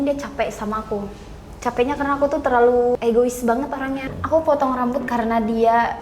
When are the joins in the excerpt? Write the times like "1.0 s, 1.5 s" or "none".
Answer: 2.9 s, 4.0 s